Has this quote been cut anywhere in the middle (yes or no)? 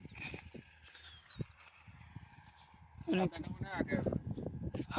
no